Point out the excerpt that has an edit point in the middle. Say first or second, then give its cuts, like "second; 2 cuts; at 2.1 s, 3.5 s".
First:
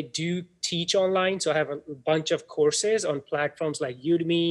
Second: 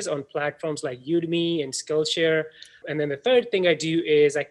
second; 1 cut; at 2.8 s